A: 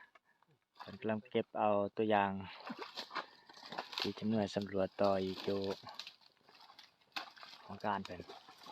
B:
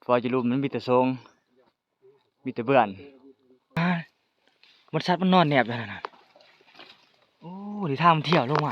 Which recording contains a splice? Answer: B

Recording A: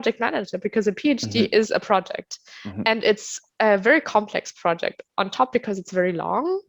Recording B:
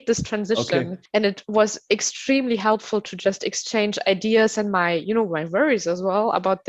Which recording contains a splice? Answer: B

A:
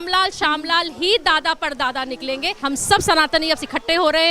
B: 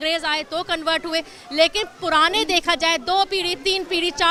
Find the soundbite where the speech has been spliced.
A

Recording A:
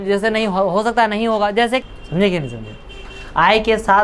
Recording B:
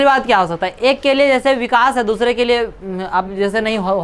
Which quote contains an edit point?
A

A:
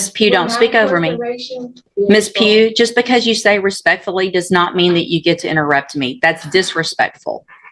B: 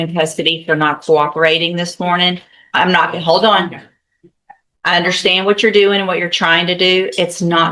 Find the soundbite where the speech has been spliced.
A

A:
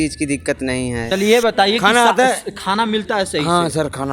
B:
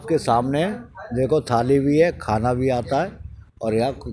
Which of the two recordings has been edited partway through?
A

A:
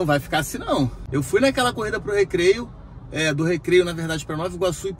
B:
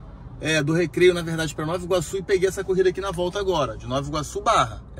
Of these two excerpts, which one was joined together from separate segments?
A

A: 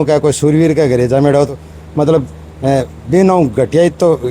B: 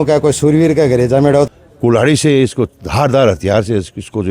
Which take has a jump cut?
B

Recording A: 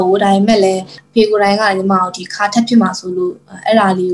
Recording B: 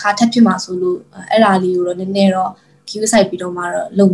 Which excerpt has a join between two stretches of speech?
A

